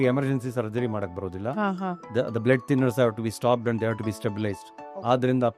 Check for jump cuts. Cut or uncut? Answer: uncut